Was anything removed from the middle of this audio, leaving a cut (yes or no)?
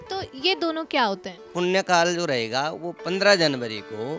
yes